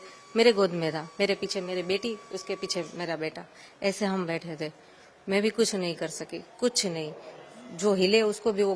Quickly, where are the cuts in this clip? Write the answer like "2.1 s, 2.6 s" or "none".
none